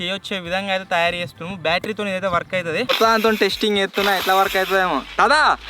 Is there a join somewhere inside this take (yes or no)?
yes